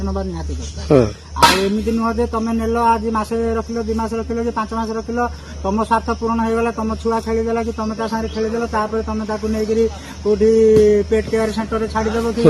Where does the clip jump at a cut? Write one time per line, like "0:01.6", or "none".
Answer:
none